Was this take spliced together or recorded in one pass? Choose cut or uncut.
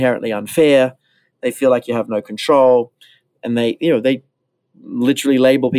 uncut